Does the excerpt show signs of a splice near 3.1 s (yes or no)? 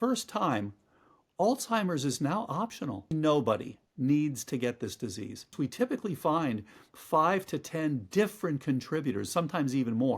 yes